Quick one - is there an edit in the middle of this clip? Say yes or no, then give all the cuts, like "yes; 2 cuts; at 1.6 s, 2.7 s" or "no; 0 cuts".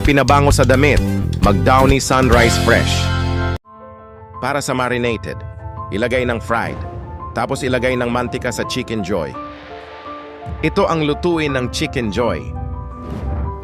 yes; 1 cut; at 3.6 s